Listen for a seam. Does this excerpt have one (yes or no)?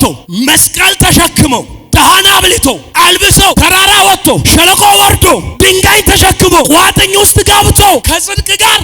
yes